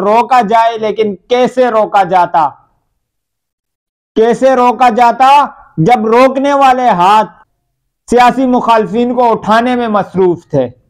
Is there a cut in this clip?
yes; 1 cut; at 7.4 s

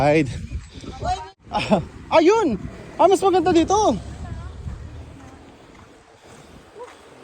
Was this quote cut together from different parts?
yes; 1 cut; at 1.3 s

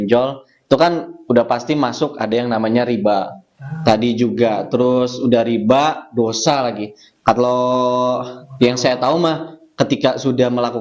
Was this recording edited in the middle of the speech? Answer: no; 0 cuts

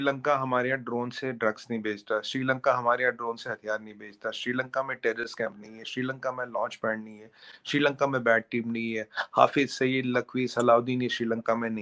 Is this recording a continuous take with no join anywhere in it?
yes; 0 cuts

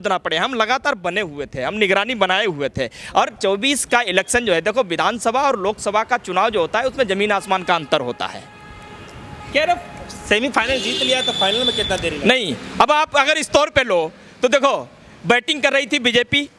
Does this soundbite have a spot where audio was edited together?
no; 0 cuts

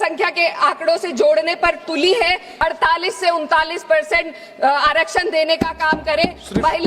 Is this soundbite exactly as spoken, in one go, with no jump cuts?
no; 1 cut; at 2.5 s

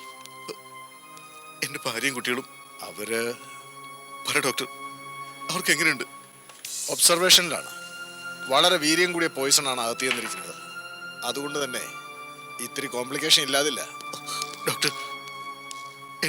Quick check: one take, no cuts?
yes; 0 cuts

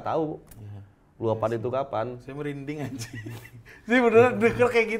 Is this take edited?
no; 0 cuts

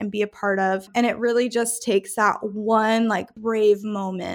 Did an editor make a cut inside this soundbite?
yes; 2 cuts; at 0.9 s, 3.3 s

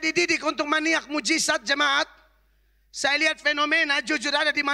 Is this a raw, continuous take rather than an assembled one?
yes; 0 cuts

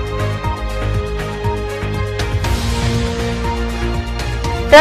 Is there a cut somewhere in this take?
yes; 1 cut; at 2.3 s

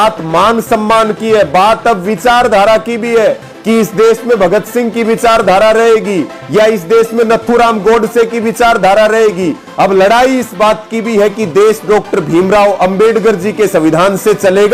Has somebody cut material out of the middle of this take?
no; 0 cuts

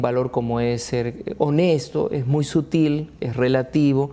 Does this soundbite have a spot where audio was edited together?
yes; 1 cut; at 1.8 s

